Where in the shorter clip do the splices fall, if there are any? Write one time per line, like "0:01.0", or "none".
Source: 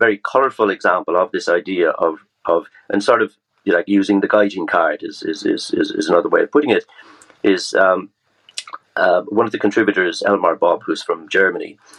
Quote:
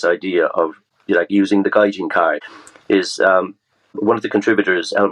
0:00.9
0:02.5
0:04.0